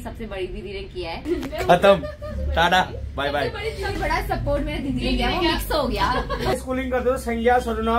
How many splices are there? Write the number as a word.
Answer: three